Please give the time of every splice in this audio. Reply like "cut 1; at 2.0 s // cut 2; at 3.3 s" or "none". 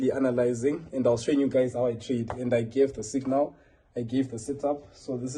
none